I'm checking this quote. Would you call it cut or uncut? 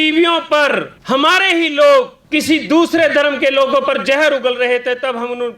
cut